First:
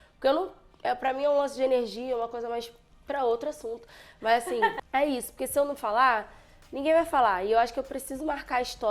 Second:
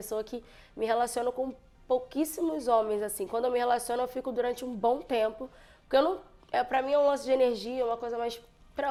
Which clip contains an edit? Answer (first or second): first